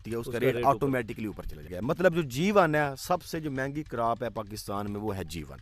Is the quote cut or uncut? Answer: cut